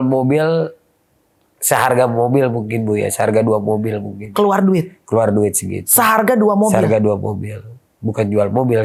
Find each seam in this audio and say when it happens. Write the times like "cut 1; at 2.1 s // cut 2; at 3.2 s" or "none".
none